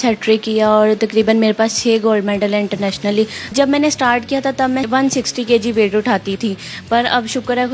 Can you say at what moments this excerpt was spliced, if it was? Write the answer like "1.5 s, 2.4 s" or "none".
3.5 s, 4.9 s, 6.3 s